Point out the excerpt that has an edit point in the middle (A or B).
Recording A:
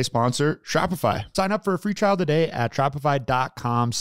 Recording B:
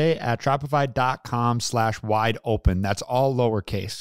A